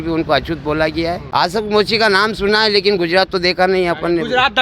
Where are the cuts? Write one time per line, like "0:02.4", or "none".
0:01.2